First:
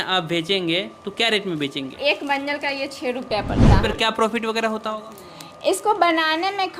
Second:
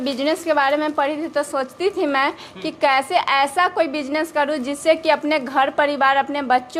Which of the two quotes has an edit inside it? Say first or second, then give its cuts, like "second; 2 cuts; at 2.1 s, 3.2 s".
first; 2 cuts; at 1.9 s, 3.8 s